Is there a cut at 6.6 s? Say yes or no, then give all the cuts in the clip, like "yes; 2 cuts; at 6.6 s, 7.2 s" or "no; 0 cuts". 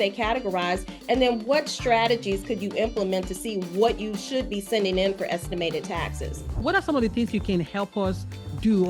yes; 1 cut; at 6.6 s